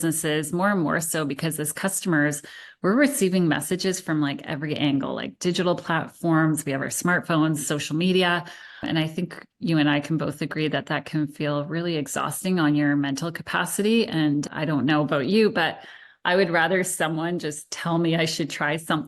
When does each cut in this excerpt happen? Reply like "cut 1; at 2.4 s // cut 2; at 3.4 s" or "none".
none